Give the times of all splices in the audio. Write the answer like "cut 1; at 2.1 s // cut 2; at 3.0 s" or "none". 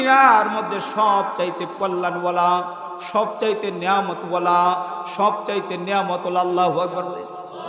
cut 1; at 5.1 s